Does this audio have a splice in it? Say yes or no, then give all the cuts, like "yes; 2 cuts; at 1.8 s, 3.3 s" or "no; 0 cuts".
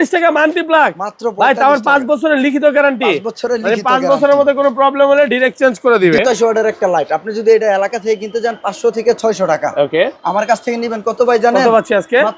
yes; 1 cut; at 6.2 s